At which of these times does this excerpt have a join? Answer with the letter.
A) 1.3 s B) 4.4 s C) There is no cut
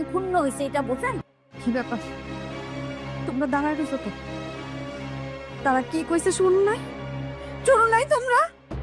A